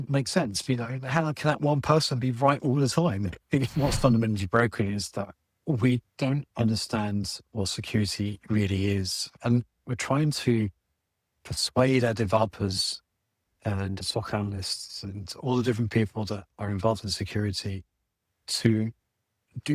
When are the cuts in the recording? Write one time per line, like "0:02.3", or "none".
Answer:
0:03.7
0:09.3
0:14.0